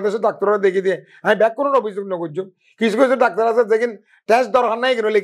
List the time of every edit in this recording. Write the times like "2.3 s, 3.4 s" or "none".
none